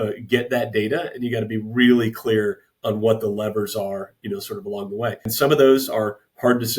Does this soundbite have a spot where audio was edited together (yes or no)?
yes